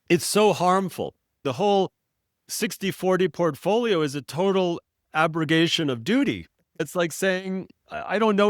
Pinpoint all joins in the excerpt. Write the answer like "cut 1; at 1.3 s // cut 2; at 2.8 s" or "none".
cut 1; at 1.4 s // cut 2; at 6.8 s